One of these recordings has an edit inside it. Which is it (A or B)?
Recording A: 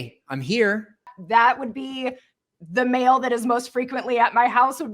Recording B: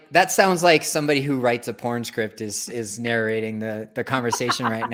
A